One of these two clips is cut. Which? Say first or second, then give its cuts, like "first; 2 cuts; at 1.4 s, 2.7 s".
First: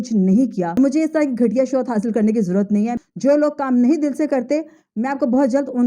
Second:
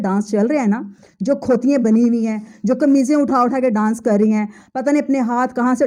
first; 2 cuts; at 0.8 s, 2.9 s